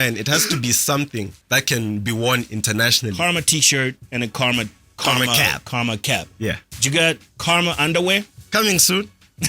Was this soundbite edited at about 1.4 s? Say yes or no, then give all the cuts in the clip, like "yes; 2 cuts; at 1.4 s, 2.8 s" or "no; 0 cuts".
yes; 6 cuts; at 1.4 s, 3.1 s, 4.0 s, 4.8 s, 7.3 s, 8.4 s